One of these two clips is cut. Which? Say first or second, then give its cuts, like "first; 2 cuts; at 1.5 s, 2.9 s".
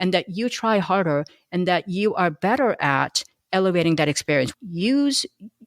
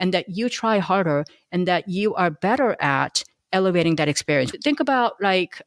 first; 1 cut; at 4.5 s